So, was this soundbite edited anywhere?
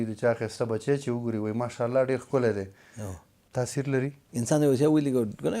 yes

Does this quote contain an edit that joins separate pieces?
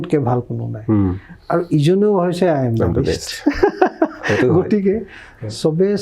no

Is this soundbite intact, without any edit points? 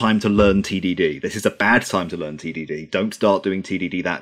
yes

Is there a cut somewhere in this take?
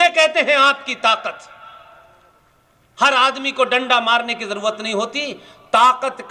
no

